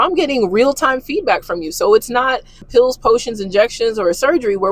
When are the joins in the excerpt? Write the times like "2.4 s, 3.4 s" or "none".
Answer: 2.6 s